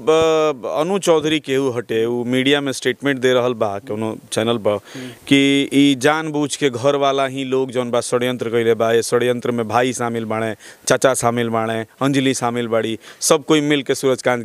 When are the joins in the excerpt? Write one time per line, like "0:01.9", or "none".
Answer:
none